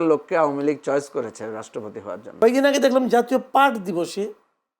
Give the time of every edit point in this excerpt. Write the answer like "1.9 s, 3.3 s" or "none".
2.4 s